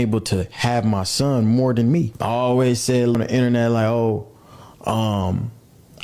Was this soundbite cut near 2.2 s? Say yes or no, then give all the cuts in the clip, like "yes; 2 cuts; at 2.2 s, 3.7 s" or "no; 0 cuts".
yes; 2 cuts; at 2.2 s, 3.2 s